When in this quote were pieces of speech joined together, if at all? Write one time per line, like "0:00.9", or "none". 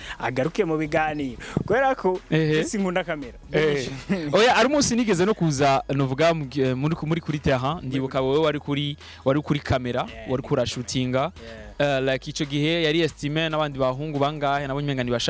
none